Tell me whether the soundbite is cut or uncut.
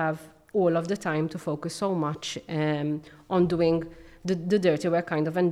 uncut